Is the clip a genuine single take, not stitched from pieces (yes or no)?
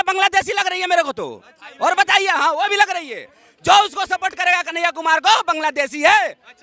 yes